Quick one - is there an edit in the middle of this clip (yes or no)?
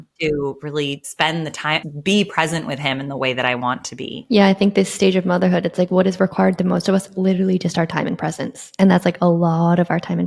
no